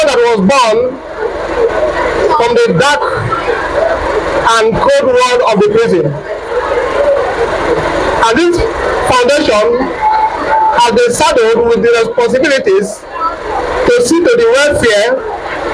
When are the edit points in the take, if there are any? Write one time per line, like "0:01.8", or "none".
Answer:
none

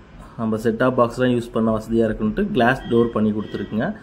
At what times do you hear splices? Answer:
none

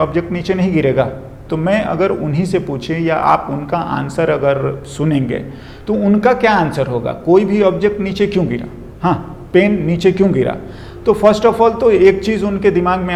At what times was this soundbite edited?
none

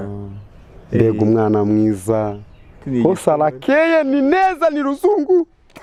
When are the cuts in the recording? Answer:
none

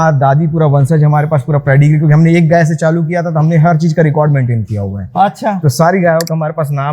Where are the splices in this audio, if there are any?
none

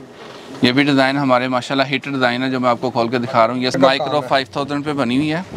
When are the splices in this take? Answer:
0:03.8

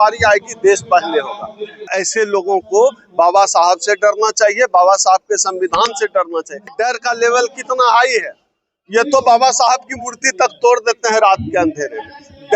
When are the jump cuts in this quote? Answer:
0:01.8
0:06.7

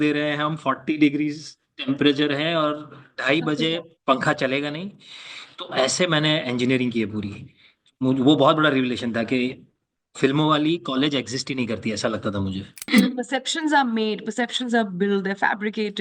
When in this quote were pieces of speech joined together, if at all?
0:12.7

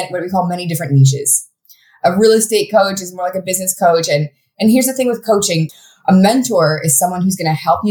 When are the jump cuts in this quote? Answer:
0:05.8

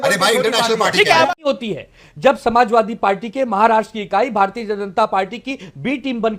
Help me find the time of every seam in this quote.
0:01.3

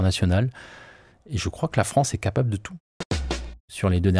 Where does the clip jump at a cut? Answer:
0:03.2

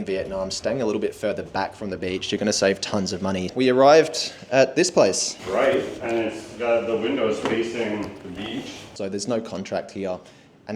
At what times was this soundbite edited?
0:03.5
0:05.3
0:08.9

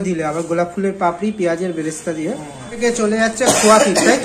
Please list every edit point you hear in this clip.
0:02.8

